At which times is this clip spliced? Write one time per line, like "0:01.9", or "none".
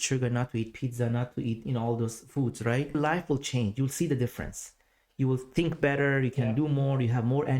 0:03.0